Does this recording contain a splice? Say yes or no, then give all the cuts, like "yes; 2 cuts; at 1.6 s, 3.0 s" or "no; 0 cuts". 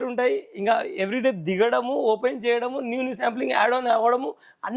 no; 0 cuts